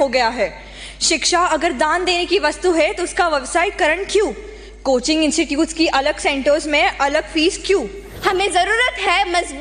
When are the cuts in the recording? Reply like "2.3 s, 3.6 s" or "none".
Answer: 8.0 s